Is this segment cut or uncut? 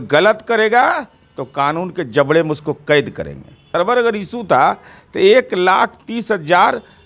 cut